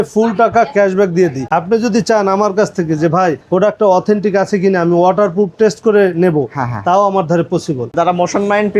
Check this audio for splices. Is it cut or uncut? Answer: cut